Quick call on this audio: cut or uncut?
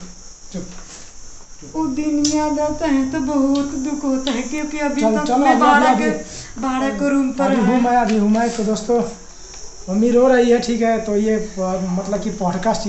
uncut